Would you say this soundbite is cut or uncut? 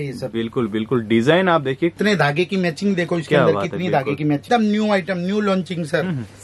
cut